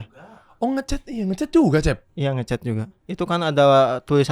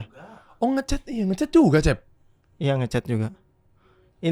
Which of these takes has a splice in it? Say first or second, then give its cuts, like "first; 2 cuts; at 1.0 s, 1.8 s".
first; 2 cuts; at 2.1 s, 3.0 s